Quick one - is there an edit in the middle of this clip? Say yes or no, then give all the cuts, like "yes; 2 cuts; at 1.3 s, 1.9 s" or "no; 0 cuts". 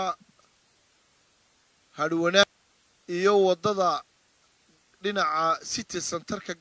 yes; 1 cut; at 2.4 s